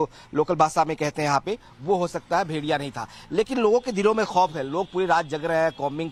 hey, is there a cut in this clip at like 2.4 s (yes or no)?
no